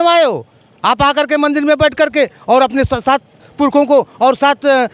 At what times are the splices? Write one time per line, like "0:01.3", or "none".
none